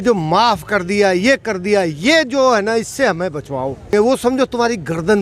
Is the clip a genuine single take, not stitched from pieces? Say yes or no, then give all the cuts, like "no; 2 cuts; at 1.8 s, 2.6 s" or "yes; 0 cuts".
no; 1 cut; at 3.9 s